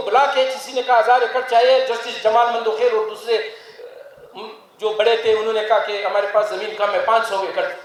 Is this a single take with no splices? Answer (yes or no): yes